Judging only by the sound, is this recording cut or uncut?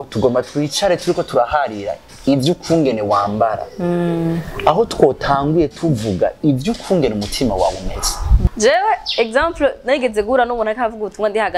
cut